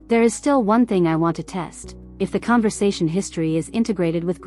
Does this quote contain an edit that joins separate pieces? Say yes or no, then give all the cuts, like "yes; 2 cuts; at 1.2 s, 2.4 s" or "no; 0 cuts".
no; 0 cuts